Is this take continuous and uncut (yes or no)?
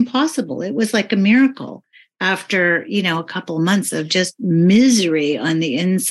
no